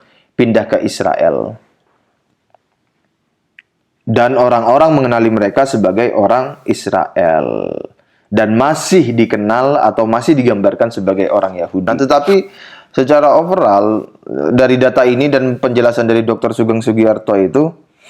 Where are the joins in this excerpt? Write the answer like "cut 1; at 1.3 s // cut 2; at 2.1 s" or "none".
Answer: cut 1; at 11.9 s